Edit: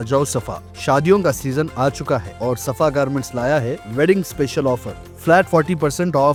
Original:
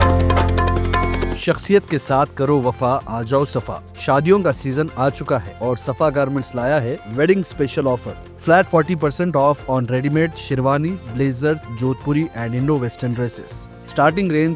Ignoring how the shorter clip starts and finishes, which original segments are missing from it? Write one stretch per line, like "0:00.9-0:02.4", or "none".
none